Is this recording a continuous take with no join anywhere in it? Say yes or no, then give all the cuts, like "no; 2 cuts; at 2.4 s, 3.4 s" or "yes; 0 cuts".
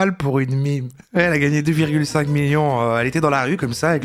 yes; 0 cuts